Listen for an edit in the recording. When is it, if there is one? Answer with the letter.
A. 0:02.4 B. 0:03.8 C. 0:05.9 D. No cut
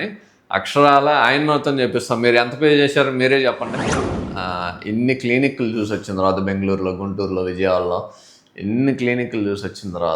B